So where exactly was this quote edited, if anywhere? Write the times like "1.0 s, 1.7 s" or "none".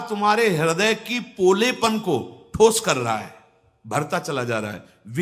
none